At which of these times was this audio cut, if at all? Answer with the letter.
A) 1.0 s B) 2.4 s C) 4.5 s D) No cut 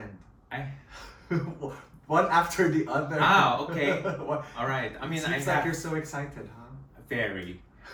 D